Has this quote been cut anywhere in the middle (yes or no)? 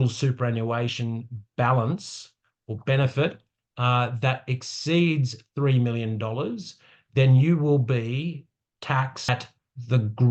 no